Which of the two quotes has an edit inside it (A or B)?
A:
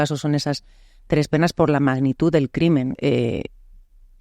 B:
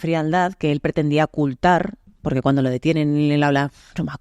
A